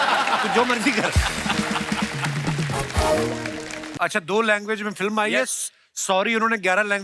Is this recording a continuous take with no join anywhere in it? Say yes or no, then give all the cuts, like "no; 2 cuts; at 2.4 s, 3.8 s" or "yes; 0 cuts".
no; 1 cut; at 3.9 s